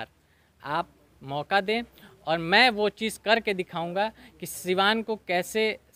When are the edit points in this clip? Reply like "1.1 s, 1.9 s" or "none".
none